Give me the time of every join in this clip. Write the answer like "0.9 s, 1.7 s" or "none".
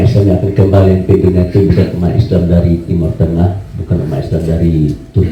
none